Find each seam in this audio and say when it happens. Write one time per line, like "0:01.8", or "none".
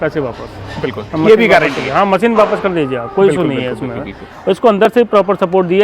0:04.3